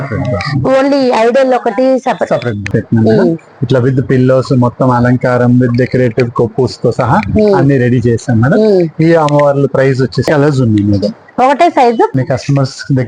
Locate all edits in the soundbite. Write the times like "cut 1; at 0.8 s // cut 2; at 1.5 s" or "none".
cut 1; at 2.6 s // cut 2; at 10.3 s // cut 3; at 12.1 s

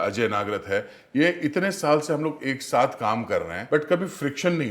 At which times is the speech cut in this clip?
cut 1; at 3.6 s

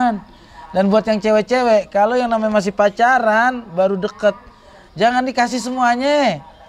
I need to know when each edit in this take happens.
none

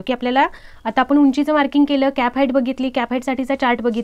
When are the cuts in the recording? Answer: none

